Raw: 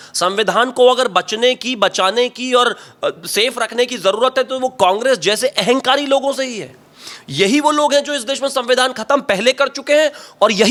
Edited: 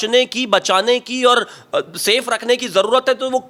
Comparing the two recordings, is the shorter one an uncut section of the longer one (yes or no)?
yes